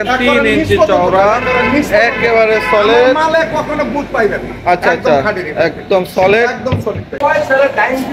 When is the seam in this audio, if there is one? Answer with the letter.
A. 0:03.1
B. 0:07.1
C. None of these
B